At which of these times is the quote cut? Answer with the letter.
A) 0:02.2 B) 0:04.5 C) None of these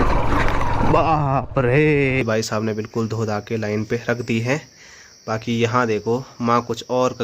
A